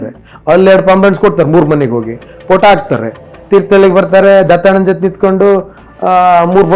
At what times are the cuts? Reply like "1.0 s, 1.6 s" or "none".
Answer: none